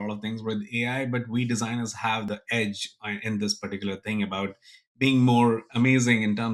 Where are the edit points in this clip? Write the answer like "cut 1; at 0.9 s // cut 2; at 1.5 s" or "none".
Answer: cut 1; at 2.3 s